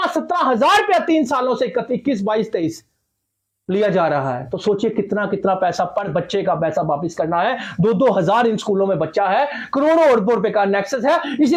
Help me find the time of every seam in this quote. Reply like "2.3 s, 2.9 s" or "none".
none